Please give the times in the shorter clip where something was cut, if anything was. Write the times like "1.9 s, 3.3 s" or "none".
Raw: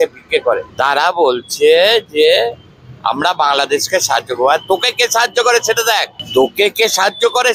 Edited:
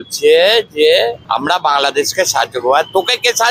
1.2 s